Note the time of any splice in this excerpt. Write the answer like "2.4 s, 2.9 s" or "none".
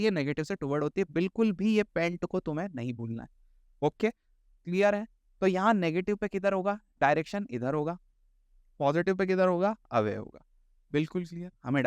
none